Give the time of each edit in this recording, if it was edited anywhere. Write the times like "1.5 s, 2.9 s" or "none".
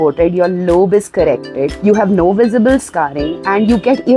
1.6 s